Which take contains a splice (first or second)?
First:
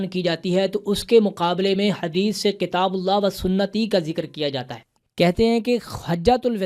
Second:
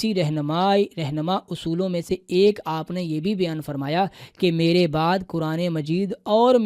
first